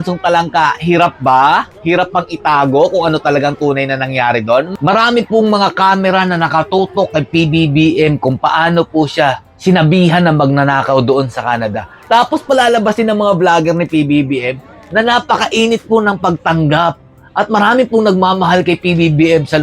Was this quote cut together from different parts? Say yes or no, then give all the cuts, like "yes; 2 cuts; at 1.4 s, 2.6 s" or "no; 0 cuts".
no; 0 cuts